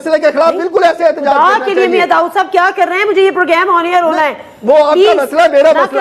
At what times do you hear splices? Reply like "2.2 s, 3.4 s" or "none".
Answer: none